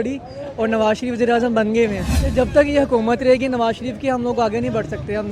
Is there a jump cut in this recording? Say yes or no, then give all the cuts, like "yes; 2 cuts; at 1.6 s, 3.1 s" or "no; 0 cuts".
yes; 1 cut; at 2.1 s